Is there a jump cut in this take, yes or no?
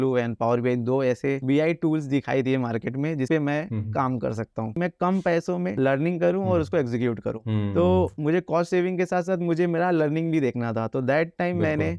yes